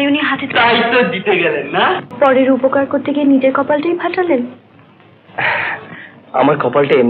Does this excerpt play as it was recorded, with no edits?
no; 1 cut; at 2.1 s

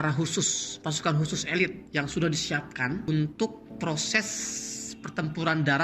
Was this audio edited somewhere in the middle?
yes; 3 cuts; at 1.8 s, 3.1 s, 3.6 s

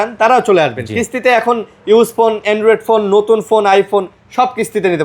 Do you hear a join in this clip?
no; 0 cuts

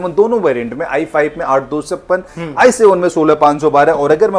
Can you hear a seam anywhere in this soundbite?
no; 0 cuts

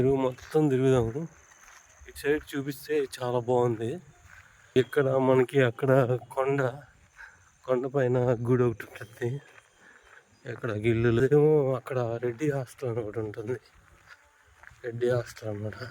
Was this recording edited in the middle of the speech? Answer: yes; 2 cuts; at 4.8 s, 11.2 s

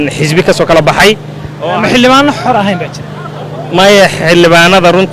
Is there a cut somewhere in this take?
no; 0 cuts

